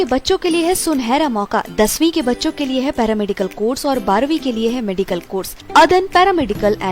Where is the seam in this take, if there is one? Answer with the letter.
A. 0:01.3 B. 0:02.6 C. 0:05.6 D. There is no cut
C